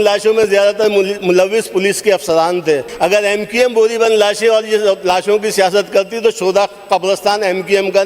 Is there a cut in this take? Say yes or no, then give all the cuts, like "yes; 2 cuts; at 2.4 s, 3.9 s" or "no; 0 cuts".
yes; 1 cut; at 2.9 s